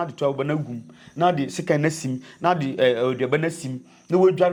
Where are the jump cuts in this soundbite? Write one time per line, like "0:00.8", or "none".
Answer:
none